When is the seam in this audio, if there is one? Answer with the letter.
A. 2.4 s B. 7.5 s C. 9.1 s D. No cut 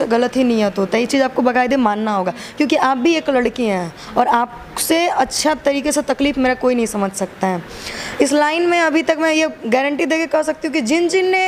D